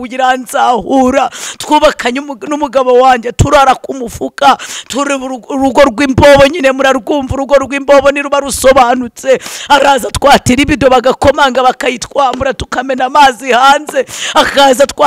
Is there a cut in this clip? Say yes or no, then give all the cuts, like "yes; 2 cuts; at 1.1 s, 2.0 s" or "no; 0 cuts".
no; 0 cuts